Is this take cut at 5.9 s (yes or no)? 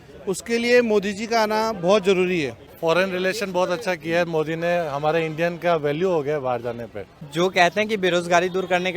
no